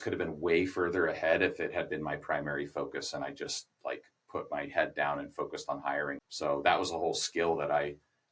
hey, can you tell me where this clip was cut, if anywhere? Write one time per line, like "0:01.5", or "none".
0:06.2